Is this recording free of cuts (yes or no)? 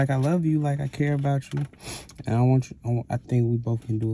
no